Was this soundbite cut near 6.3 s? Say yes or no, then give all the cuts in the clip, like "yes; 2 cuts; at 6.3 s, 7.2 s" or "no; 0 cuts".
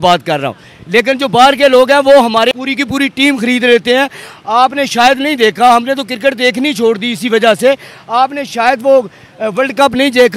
no; 1 cut; at 2.5 s